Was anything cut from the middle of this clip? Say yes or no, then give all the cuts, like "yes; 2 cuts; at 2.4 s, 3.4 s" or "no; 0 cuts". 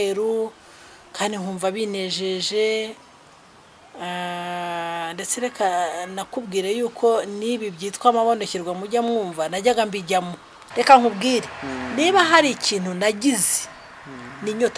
yes; 1 cut; at 10.6 s